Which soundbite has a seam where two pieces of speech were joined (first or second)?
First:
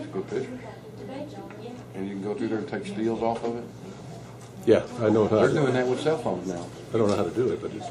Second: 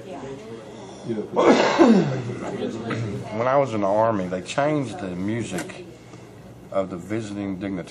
second